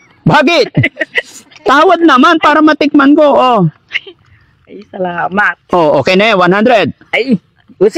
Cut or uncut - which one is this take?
uncut